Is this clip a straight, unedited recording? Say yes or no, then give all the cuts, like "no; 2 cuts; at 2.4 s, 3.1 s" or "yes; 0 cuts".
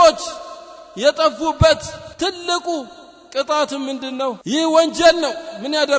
no; 2 cuts; at 2.0 s, 4.4 s